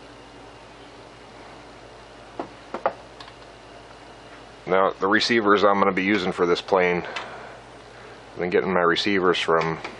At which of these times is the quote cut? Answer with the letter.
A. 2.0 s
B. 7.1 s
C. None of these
C